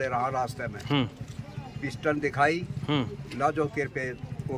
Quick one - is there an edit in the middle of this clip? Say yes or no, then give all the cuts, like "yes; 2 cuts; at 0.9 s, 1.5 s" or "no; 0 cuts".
no; 0 cuts